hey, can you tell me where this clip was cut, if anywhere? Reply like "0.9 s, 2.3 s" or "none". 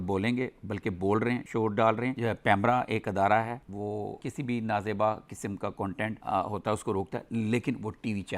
2.2 s